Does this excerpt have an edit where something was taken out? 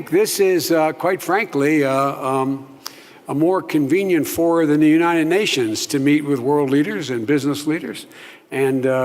yes; 1 cut; at 4.7 s

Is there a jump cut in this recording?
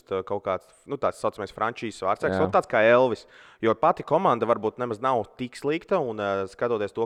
no; 0 cuts

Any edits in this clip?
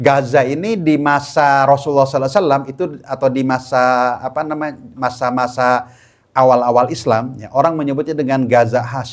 no; 0 cuts

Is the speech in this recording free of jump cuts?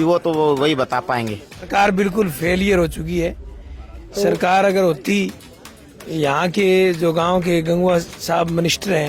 no; 1 cut; at 1.6 s

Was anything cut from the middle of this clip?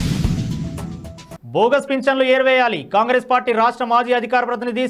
yes; 1 cut; at 1.2 s

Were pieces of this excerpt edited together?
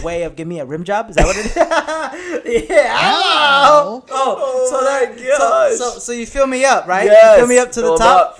yes; 1 cut; at 4.0 s

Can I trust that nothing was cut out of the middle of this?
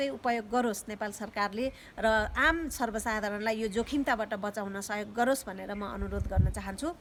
yes; 0 cuts

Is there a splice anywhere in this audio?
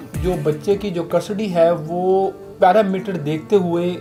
no; 0 cuts

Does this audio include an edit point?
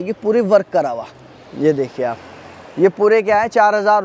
no; 0 cuts

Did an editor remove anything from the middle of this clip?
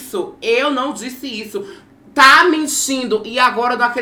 no; 0 cuts

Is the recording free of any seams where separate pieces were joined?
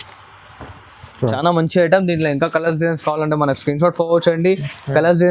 no; 1 cut; at 1.2 s

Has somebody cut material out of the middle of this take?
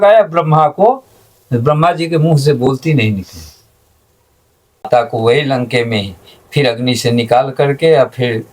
yes; 1 cut; at 4.9 s

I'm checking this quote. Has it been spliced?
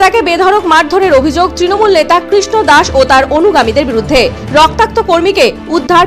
no; 0 cuts

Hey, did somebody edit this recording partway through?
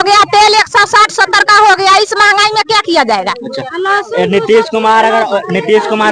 no; 0 cuts

